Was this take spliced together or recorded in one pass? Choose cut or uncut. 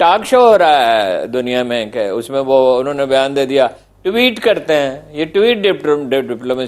uncut